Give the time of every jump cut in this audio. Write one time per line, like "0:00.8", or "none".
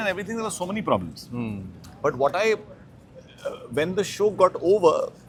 none